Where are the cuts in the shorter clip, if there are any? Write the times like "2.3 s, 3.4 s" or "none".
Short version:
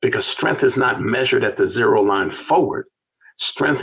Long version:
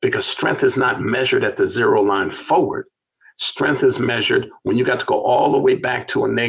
none